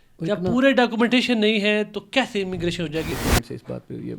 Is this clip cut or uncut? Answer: cut